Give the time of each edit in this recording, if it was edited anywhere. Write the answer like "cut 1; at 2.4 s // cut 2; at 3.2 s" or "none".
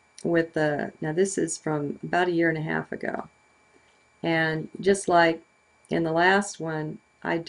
cut 1; at 2.3 s